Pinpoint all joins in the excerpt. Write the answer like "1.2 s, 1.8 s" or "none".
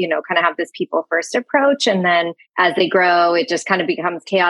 2.3 s